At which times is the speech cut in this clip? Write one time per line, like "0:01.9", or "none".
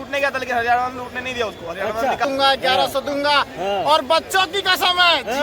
0:02.2

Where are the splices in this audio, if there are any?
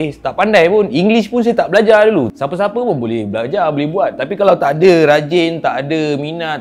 0:02.3

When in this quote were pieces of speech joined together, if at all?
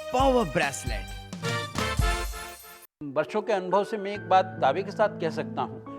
0:02.6

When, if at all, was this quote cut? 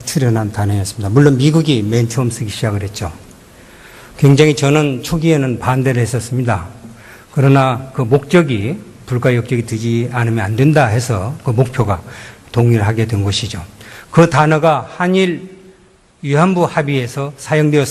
0:04.5

